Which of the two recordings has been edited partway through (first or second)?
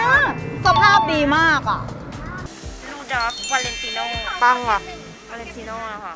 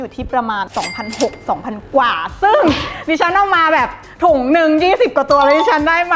first